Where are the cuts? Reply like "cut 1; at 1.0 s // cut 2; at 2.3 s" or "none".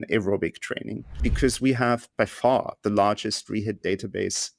cut 1; at 1.2 s // cut 2; at 2.1 s